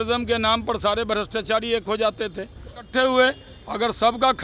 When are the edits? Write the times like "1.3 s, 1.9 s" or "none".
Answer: 2.9 s

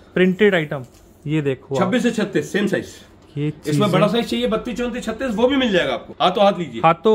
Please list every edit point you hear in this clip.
6.1 s

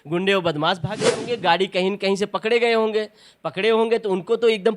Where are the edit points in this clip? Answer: 1.0 s

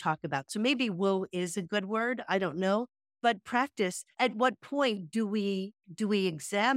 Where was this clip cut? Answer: 3.0 s, 4.1 s

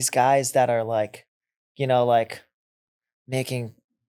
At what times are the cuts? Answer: none

